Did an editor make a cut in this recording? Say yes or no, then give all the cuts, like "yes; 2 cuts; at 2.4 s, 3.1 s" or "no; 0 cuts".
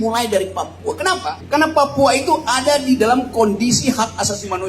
yes; 1 cut; at 1.4 s